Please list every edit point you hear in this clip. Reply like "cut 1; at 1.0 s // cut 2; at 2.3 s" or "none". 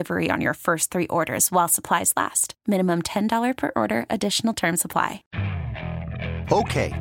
cut 1; at 5.2 s